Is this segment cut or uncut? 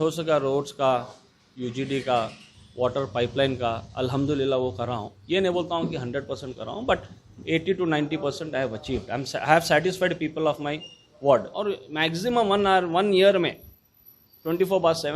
cut